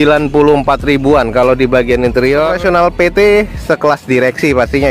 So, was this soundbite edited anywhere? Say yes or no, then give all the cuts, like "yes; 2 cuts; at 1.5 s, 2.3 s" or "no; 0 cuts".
yes; 1 cut; at 2.5 s